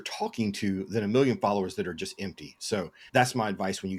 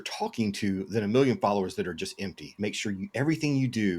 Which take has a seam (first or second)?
second